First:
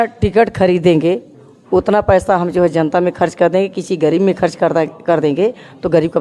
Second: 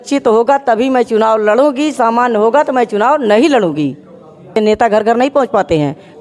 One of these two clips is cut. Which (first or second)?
second